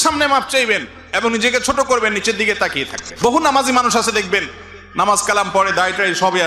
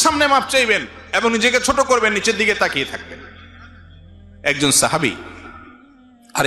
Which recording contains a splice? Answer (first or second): first